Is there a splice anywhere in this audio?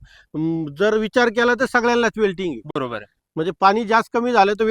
no; 0 cuts

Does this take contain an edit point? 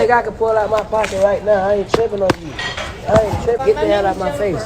yes; 1 cut; at 3.2 s

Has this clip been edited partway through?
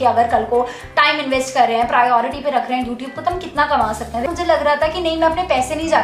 yes; 1 cut; at 4.3 s

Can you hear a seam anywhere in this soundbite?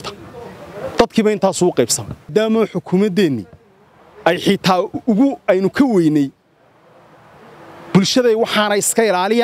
yes; 1 cut; at 2.3 s

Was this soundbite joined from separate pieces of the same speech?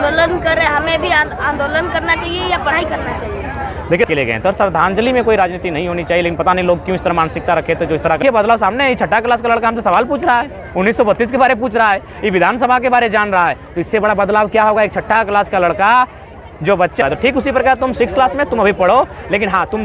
yes; 3 cuts; at 4.1 s, 8.2 s, 17.0 s

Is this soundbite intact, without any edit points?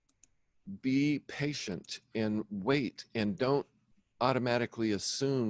yes; 0 cuts

